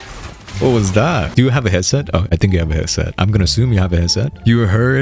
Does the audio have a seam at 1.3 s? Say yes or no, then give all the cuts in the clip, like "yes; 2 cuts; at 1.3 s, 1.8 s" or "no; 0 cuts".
yes; 1 cut; at 1.3 s